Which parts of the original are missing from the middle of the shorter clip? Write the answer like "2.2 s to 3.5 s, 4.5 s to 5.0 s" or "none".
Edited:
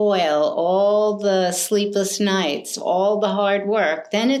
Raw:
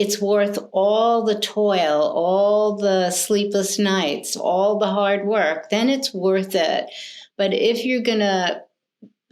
none